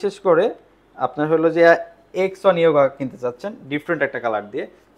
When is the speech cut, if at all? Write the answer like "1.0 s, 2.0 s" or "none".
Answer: none